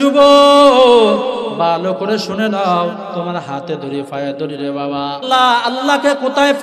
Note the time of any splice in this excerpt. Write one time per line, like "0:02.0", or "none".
0:05.2